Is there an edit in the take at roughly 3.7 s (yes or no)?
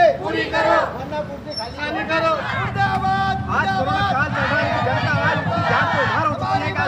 no